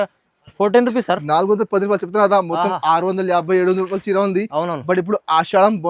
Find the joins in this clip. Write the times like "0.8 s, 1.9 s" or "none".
none